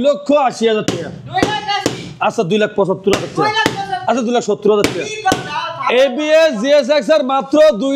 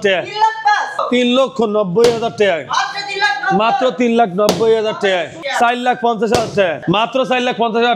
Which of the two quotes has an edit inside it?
second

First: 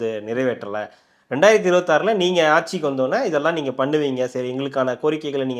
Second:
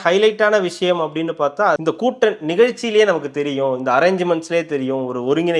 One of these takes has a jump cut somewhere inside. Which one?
second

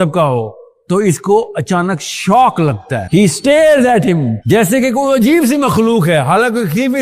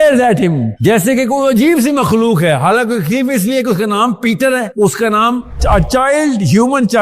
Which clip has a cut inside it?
second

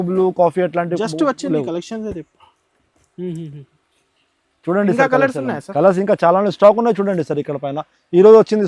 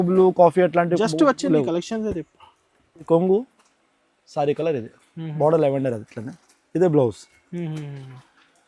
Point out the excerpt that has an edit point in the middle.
second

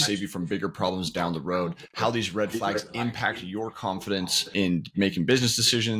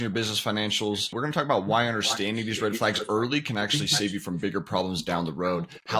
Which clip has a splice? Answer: first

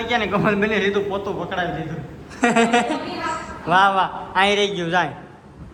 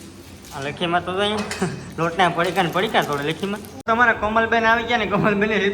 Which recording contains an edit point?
second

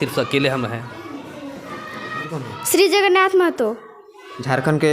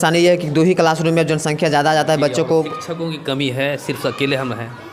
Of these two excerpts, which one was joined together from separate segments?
first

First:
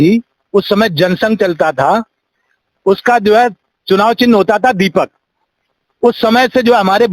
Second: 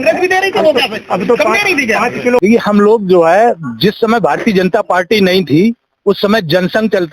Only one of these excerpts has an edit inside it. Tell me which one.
second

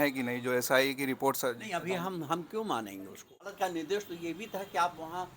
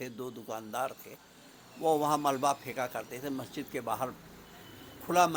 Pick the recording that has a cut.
first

